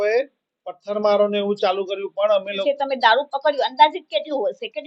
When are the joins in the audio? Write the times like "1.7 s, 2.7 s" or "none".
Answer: 2.6 s

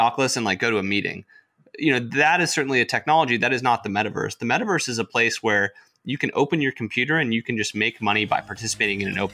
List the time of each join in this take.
none

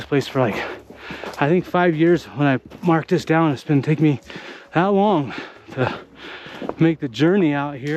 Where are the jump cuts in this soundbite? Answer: none

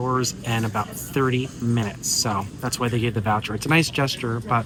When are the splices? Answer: none

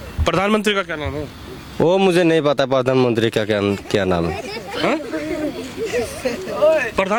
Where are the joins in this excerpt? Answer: none

